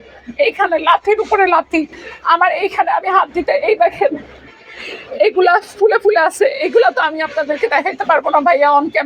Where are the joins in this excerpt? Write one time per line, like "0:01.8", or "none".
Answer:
none

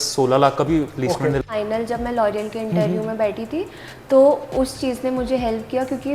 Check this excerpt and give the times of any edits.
0:01.4

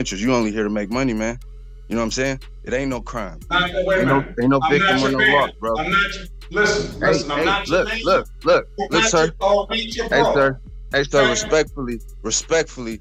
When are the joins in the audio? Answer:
none

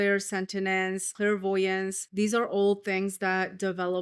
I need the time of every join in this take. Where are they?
0:01.1
0:02.0

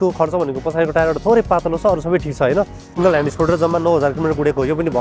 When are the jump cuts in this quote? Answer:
0:03.0

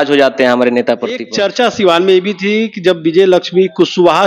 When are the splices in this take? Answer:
0:01.3

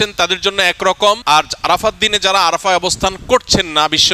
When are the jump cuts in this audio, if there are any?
0:01.2

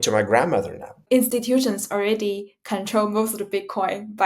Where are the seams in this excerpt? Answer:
0:01.0

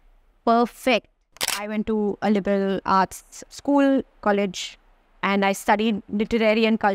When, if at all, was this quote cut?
0:01.5
0:03.0
0:04.2

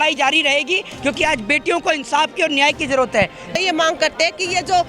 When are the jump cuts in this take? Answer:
0:03.5

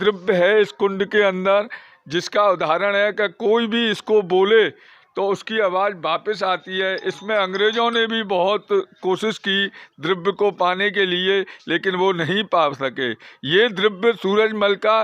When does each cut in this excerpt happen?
none

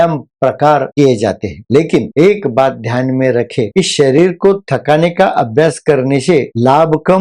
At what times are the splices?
none

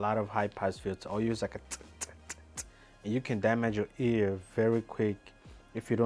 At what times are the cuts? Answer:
none

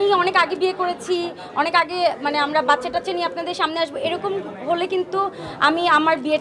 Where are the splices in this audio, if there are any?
none

